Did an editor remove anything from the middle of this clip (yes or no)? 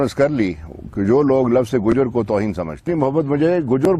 yes